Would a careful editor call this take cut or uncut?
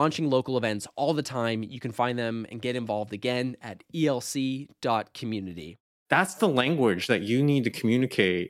cut